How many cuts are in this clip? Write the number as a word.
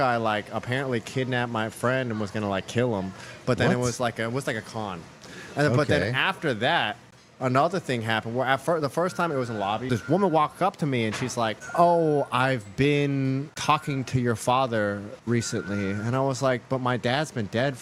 zero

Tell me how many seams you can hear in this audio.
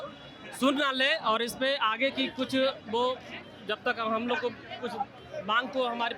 zero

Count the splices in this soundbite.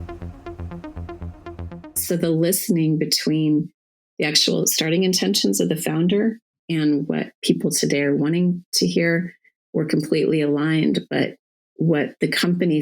one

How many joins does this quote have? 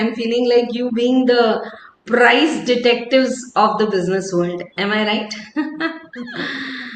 zero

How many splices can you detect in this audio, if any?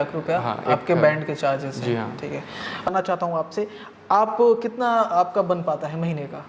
one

